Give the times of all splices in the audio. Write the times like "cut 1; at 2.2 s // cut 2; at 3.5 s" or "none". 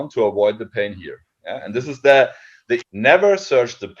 cut 1; at 2.9 s